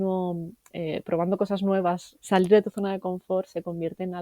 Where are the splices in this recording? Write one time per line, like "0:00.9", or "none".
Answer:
0:02.1